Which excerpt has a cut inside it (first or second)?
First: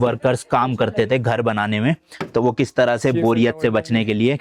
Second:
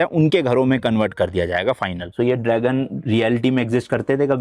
second